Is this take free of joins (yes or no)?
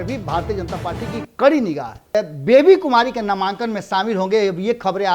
no